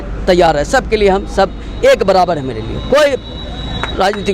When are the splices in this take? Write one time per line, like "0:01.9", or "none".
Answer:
none